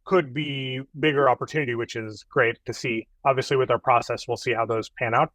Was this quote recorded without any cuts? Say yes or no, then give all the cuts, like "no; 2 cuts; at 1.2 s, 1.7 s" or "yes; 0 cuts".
yes; 0 cuts